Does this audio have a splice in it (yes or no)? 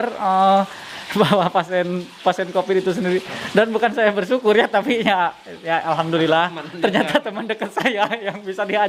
no